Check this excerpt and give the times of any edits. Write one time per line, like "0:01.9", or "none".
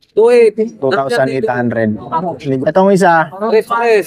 0:02.6